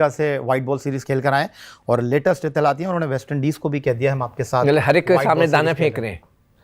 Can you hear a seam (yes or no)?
no